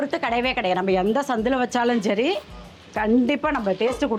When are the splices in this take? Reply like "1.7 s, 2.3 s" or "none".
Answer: none